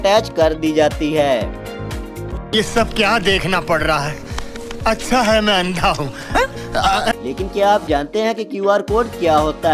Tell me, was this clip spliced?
yes; 2 cuts; at 2.3 s, 7.2 s

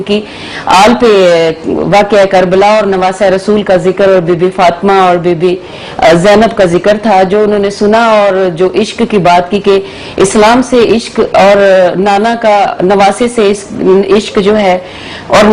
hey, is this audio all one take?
yes; 0 cuts

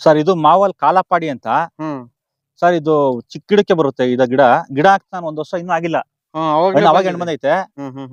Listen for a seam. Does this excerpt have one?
no; 0 cuts

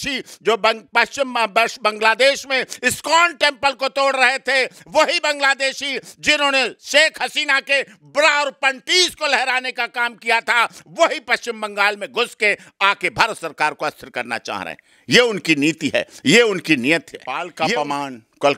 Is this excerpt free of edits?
no; 1 cut; at 17.7 s

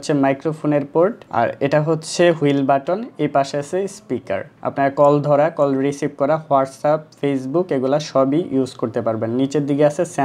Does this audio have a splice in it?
no; 0 cuts

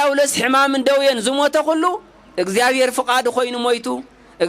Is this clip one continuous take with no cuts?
yes; 0 cuts

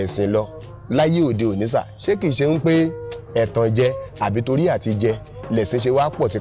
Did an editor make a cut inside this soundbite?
no; 0 cuts

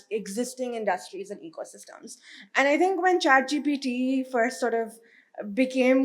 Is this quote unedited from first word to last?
yes; 0 cuts

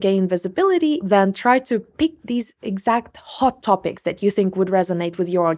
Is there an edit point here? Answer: yes; 1 cut; at 1.0 s

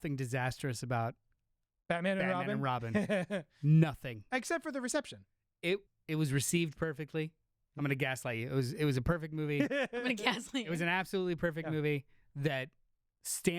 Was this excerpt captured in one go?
no; 1 cut; at 5.9 s

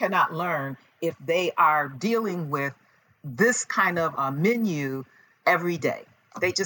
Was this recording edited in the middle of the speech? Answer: yes; 1 cut; at 4.1 s

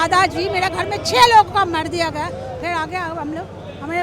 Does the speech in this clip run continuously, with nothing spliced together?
yes; 0 cuts

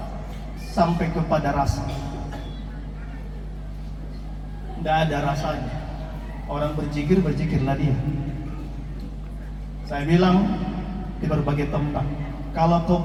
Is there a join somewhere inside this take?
no; 0 cuts

